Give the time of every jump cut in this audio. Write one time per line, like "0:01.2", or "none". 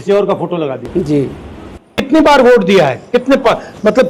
none